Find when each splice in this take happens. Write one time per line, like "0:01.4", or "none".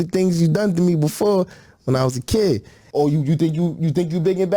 0:02.8